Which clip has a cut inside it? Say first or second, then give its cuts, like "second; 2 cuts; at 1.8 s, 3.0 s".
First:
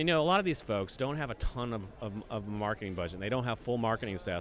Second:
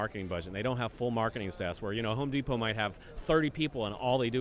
first; 1 cut; at 0.9 s